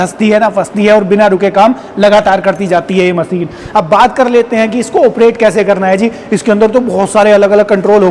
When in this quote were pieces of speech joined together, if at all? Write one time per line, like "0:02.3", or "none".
none